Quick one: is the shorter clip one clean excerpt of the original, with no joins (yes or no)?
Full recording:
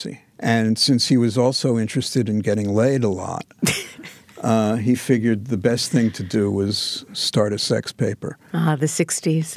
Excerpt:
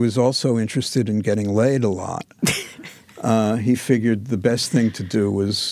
yes